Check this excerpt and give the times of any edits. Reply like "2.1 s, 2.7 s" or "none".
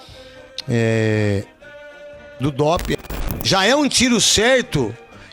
3.0 s

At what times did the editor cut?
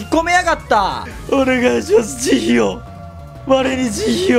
1.1 s

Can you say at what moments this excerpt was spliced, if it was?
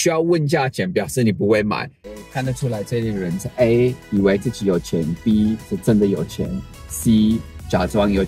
1.9 s

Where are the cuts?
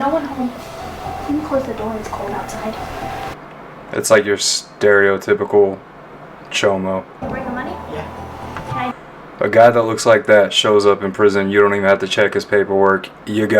3.3 s, 7.2 s

